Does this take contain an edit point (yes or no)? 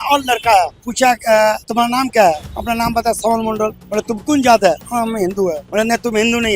yes